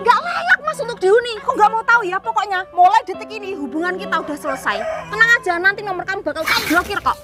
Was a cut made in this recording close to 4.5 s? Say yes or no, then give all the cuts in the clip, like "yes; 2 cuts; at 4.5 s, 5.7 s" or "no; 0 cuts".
no; 1 cut; at 1.3 s